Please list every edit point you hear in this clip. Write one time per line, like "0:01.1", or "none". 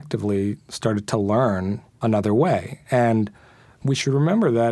0:01.8
0:03.6